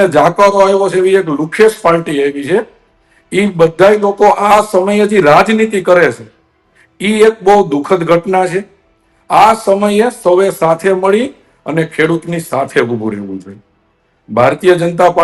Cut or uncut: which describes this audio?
uncut